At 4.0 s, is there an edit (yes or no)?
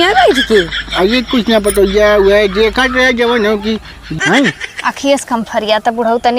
yes